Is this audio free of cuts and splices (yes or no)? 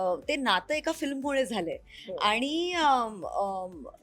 yes